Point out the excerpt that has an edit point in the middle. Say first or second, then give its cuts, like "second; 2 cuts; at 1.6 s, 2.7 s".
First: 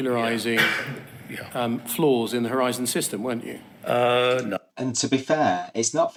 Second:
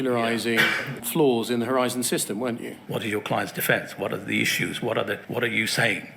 second; 3 cuts; at 1.0 s, 2.7 s, 5.2 s